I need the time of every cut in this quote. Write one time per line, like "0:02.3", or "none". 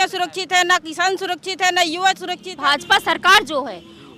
0:02.5